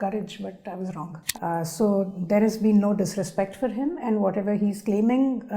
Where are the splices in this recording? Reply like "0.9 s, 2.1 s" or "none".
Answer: 1.2 s